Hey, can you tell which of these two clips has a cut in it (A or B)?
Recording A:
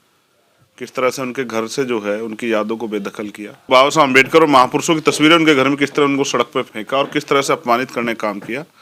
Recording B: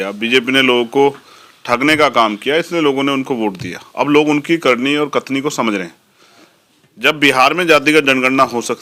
A